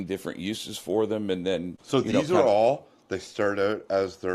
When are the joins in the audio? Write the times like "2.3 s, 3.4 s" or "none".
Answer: 1.8 s